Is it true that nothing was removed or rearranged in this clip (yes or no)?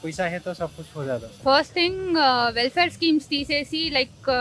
no